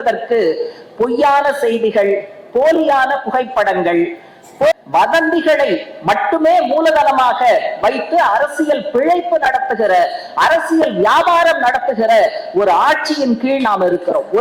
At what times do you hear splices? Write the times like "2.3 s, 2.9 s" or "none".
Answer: 4.7 s